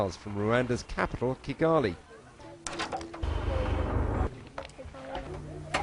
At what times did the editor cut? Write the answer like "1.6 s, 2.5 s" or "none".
3.7 s